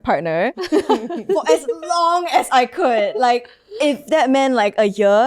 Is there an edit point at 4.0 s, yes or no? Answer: no